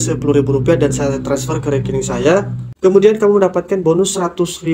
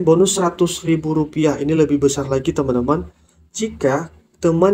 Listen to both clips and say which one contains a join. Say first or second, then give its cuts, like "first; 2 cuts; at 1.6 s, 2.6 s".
first; 1 cut; at 2.6 s